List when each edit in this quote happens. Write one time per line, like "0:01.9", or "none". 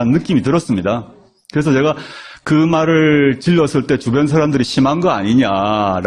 0:01.5